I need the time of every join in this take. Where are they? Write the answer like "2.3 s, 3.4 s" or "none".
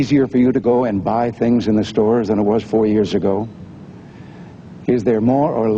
4.1 s